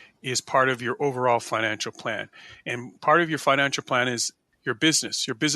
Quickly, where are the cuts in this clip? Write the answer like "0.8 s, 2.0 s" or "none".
4.4 s

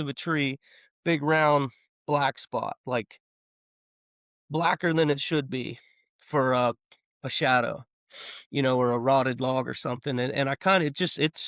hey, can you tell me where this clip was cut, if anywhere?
none

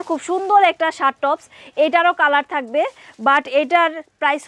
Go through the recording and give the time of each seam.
none

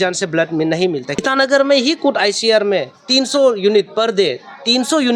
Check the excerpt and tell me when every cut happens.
1.2 s

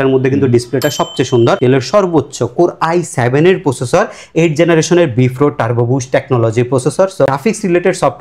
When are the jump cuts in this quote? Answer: 1.6 s, 7.3 s

